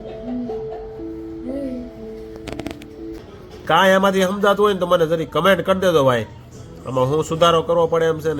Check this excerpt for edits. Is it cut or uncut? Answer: cut